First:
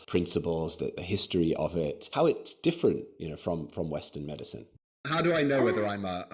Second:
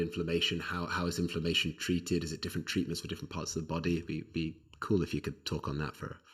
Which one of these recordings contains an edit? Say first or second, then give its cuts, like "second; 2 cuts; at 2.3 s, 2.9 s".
first; 3 cuts; at 1.0 s, 2.1 s, 4.7 s